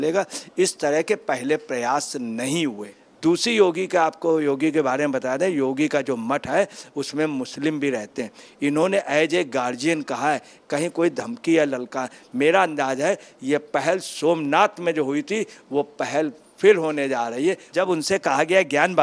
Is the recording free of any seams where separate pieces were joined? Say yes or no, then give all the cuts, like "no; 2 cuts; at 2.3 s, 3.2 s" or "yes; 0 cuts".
no; 2 cuts; at 3.0 s, 17.6 s